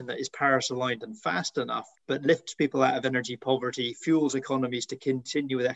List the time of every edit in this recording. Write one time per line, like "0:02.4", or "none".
0:01.9